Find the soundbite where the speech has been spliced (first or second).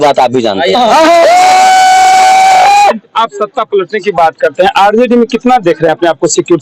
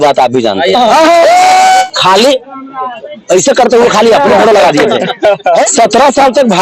second